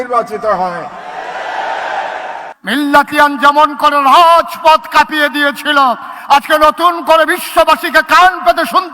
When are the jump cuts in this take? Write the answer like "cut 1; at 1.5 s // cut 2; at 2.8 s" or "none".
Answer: cut 1; at 2.4 s